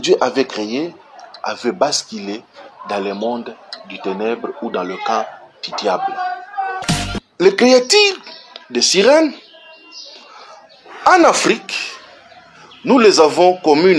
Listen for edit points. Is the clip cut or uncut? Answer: cut